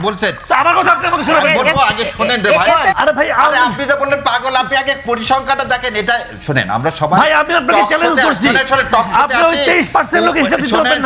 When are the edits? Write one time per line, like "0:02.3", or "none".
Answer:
0:02.9

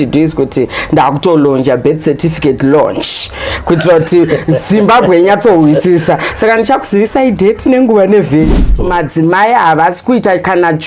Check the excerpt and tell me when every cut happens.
0:08.6

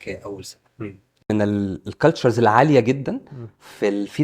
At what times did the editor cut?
0:01.3

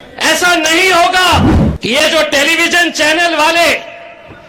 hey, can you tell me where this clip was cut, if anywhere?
0:01.6

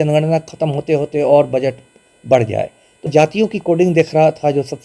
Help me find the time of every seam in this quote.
0:03.1

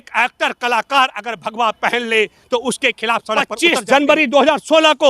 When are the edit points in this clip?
0:03.5

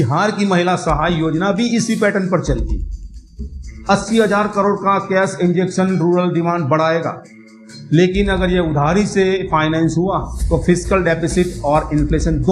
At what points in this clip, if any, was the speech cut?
0:03.4

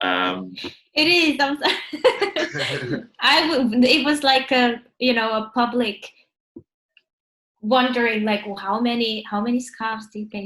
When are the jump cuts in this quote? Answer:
none

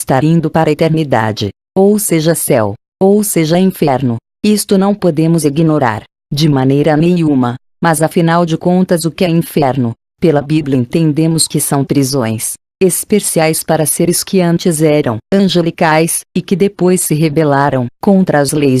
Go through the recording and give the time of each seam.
0:11.8

